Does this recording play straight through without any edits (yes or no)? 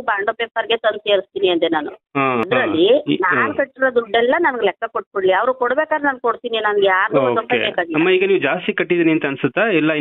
no